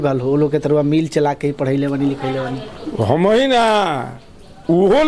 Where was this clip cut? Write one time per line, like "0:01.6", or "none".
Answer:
none